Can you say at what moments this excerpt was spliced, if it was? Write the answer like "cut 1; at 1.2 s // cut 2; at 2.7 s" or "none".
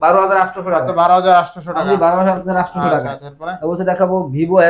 none